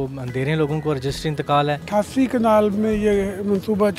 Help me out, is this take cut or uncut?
cut